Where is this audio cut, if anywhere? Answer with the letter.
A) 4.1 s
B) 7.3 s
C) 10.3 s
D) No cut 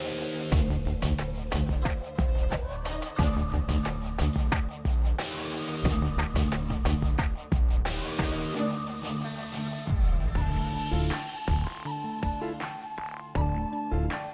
C